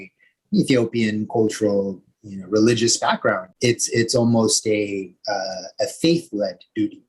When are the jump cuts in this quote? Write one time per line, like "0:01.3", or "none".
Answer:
0:03.5

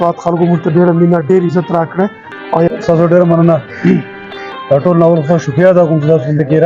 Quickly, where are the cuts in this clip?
0:02.7

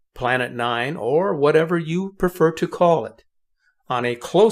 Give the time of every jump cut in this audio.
none

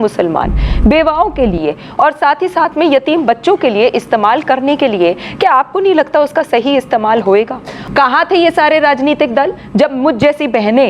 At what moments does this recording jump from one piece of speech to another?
0:07.8

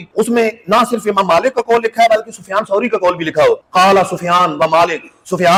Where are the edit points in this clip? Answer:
none

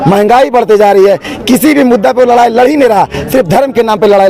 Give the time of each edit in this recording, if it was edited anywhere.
none

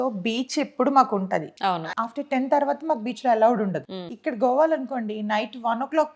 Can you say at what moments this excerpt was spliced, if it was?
0:01.5

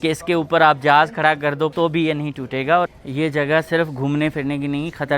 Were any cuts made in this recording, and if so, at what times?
0:01.7
0:03.0

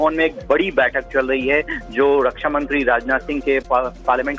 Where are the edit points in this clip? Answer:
none

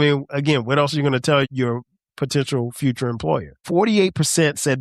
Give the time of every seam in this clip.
0:01.5
0:03.5

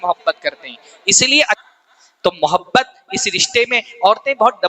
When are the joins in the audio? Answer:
0:01.6

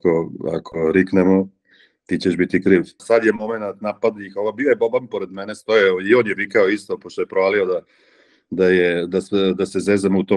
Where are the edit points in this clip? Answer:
0:03.0

